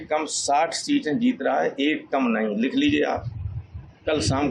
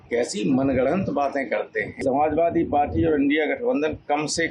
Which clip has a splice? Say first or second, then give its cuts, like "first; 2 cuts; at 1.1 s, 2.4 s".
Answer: second; 1 cut; at 2.0 s